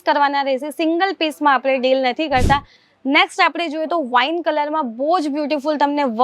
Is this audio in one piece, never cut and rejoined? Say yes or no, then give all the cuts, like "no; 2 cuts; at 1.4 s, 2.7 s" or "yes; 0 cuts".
yes; 0 cuts